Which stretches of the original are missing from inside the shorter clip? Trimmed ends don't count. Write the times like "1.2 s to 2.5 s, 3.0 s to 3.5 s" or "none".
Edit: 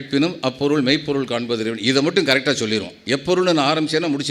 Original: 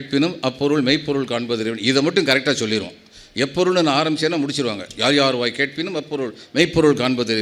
2.9 s to 3.2 s